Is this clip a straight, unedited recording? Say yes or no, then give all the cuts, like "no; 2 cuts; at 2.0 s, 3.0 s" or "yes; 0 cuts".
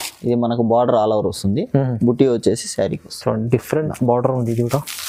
yes; 0 cuts